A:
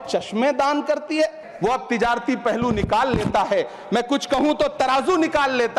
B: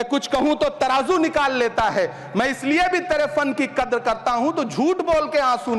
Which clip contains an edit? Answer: A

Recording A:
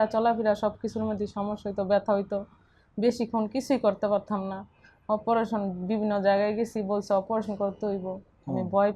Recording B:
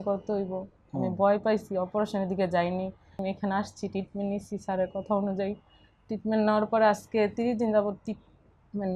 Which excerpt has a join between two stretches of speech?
B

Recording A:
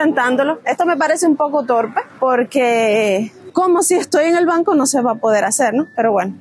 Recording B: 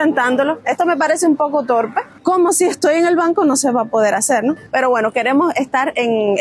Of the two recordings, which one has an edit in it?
B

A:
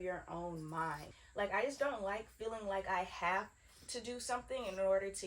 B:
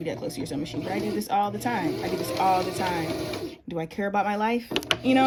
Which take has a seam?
A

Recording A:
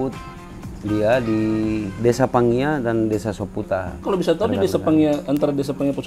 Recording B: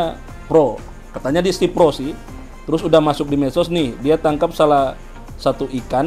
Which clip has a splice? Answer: A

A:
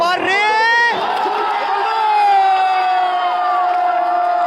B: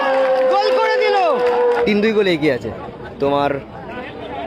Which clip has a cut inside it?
B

